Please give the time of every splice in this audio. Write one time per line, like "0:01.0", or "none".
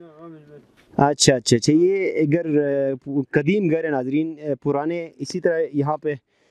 none